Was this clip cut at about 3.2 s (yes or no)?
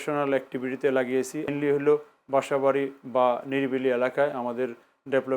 no